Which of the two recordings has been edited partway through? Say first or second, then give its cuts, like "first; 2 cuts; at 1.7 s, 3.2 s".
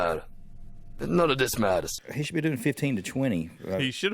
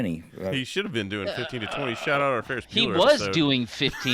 first; 1 cut; at 1.9 s